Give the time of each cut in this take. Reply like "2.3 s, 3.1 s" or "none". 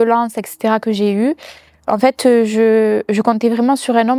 none